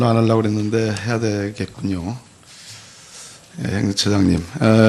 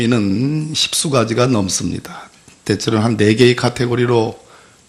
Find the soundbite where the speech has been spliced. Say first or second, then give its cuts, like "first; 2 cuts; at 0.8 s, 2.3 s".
second; 1 cut; at 3.7 s